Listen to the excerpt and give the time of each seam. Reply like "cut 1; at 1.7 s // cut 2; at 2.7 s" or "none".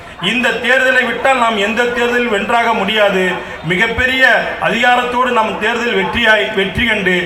none